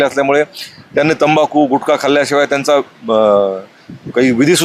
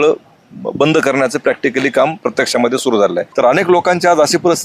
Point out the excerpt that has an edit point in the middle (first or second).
second